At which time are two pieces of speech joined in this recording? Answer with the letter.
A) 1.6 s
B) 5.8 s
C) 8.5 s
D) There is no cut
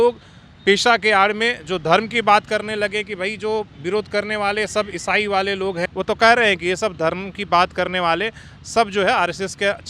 B